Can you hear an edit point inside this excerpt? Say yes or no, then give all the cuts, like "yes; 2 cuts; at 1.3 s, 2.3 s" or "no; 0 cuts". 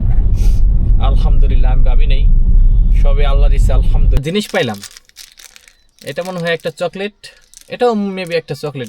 yes; 1 cut; at 4.2 s